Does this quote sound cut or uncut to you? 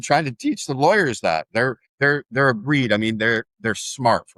uncut